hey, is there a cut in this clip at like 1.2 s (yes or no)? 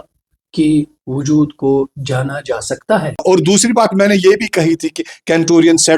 no